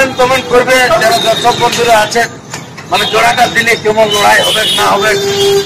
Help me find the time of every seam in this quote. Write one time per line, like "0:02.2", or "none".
none